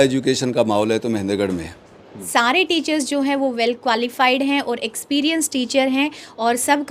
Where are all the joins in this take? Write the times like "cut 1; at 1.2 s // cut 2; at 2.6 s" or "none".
cut 1; at 2.2 s

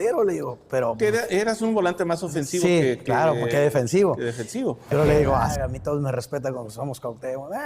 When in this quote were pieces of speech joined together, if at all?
cut 1; at 5.5 s

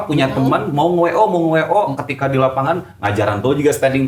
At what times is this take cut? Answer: none

